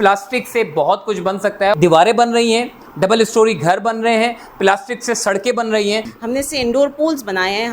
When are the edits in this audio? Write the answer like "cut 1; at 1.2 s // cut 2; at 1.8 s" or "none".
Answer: cut 1; at 1.7 s // cut 2; at 6.1 s